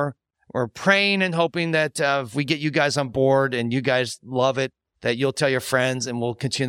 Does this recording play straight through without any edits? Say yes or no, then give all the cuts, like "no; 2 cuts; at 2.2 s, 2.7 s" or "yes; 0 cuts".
yes; 0 cuts